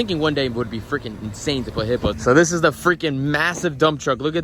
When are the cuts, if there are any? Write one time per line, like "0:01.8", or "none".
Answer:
0:02.1